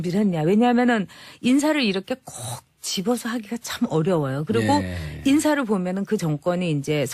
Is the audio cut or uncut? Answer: cut